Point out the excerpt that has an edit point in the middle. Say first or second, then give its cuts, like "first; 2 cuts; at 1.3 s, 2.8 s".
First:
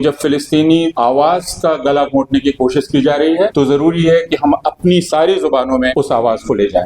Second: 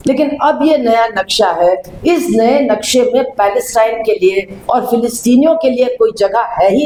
first; 3 cuts; at 0.9 s, 3.5 s, 5.9 s